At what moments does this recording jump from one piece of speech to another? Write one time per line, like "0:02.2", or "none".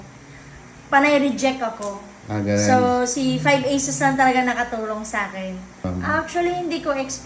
0:05.9